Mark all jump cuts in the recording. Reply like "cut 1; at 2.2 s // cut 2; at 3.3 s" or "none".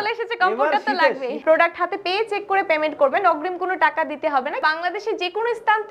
cut 1; at 1.4 s // cut 2; at 4.6 s